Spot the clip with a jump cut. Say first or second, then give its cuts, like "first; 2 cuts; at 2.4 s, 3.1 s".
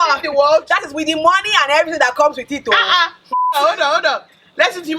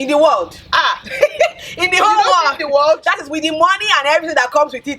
first; 1 cut; at 3.5 s